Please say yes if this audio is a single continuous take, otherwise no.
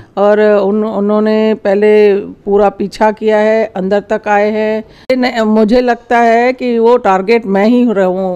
no